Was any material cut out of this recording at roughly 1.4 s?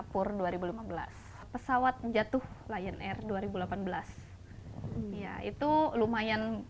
yes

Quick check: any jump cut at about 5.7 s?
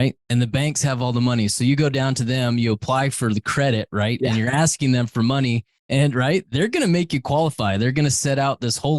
yes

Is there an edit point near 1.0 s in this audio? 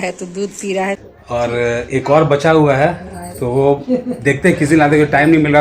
yes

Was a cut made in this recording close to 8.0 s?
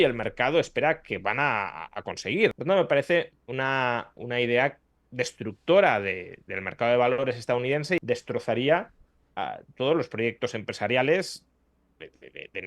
yes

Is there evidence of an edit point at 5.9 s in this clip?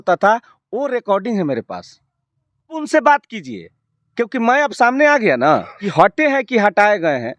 yes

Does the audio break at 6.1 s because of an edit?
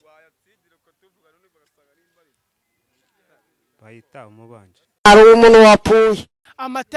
yes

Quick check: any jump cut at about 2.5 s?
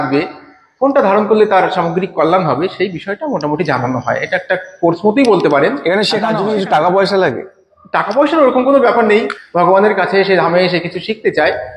no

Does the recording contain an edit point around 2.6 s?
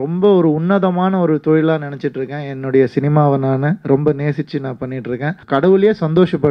no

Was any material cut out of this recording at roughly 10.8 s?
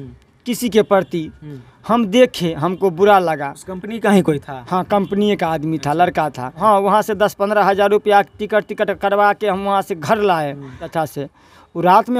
yes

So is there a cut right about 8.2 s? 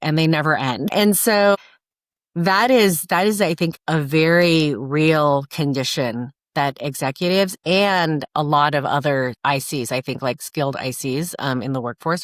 yes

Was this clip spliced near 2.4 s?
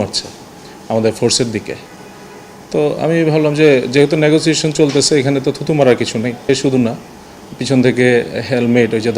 no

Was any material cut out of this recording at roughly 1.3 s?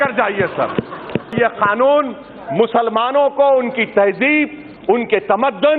yes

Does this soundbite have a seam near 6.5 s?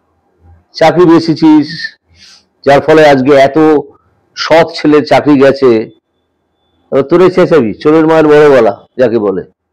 no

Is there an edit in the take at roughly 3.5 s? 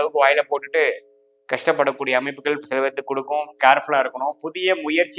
yes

